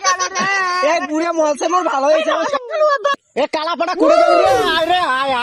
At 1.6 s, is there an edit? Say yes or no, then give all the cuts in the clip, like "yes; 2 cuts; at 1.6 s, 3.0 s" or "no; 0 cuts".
no; 1 cut; at 3.2 s